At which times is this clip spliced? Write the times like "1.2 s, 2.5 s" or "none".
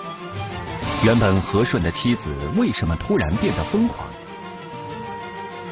1.0 s